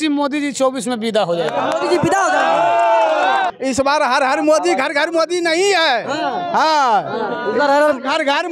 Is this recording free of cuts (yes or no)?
no